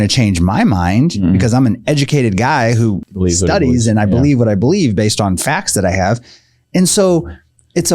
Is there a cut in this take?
yes; 1 cut; at 3.0 s

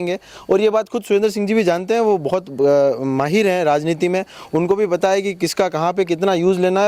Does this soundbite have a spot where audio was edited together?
no; 0 cuts

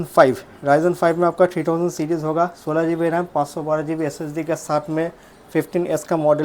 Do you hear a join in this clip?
no; 0 cuts

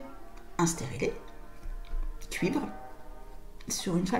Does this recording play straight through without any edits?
yes; 0 cuts

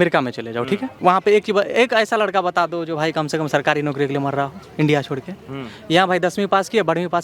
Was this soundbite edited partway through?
yes; 1 cut; at 0.9 s

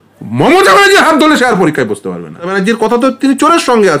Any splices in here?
yes; 1 cut; at 2.5 s

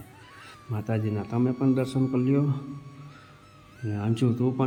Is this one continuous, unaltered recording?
yes; 0 cuts

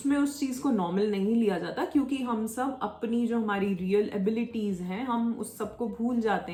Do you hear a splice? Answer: no; 0 cuts

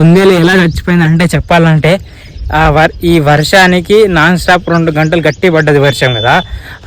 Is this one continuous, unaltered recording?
yes; 0 cuts

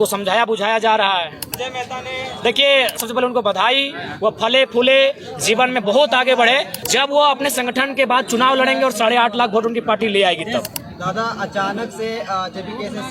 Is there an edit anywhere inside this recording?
yes; 4 cuts; at 1.5 s, 3.0 s, 6.7 s, 10.8 s

